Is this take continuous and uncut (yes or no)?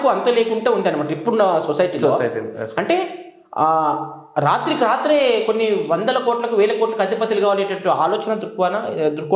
yes